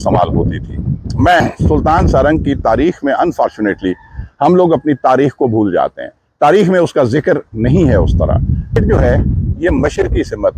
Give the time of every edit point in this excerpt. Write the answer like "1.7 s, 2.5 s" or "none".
1.4 s, 8.8 s